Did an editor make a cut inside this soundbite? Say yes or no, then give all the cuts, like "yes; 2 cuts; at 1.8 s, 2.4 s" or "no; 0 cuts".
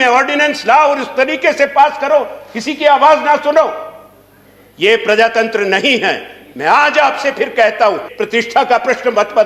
yes; 1 cut; at 8.1 s